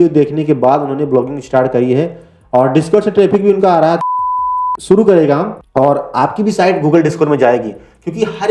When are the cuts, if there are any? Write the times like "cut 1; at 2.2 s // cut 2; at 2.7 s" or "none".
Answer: cut 1; at 4.3 s